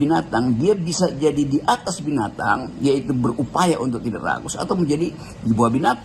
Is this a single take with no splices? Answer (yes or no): yes